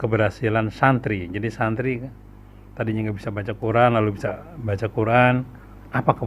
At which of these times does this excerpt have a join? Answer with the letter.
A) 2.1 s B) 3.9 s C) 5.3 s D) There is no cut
D